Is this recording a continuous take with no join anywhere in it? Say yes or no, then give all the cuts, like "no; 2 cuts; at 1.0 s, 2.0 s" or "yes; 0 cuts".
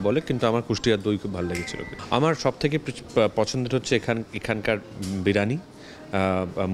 no; 1 cut; at 1.8 s